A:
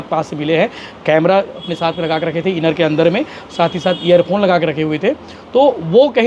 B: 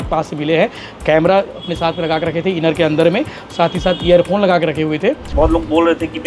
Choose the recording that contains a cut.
B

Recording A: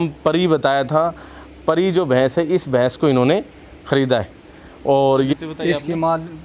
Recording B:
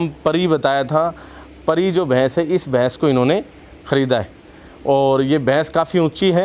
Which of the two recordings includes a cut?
A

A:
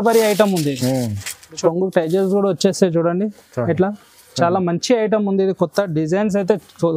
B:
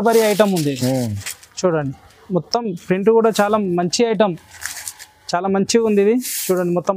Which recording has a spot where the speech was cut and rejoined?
A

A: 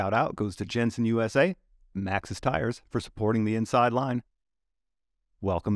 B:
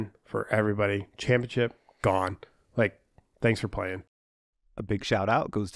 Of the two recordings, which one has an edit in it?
B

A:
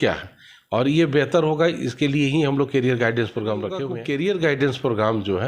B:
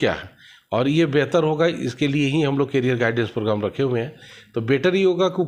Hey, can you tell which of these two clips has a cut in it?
A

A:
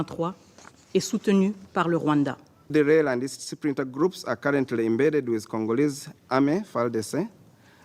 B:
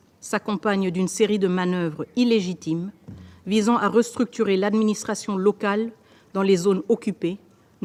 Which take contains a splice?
A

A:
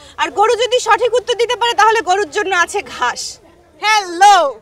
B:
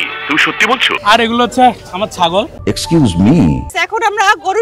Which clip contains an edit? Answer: B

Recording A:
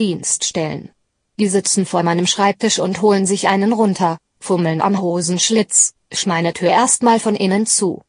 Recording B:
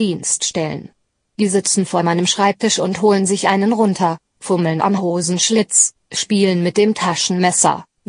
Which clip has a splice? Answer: B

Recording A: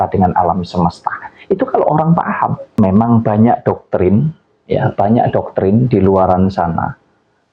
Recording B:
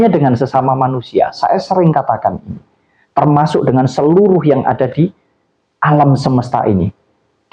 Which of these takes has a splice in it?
A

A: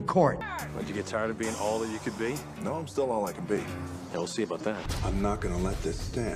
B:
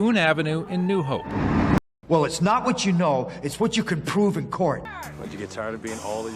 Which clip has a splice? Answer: B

